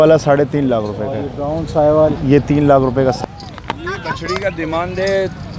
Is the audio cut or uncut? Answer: cut